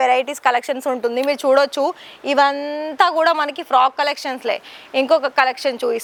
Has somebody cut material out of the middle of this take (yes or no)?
no